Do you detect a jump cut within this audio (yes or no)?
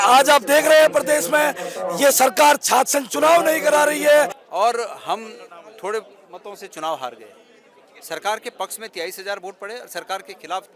yes